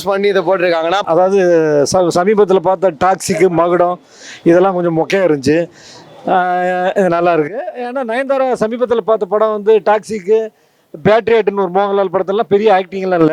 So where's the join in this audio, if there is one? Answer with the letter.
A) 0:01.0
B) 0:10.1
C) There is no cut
A